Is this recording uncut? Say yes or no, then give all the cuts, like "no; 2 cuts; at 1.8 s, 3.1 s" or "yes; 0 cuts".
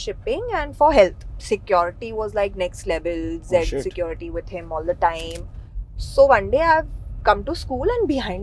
no; 1 cut; at 1.3 s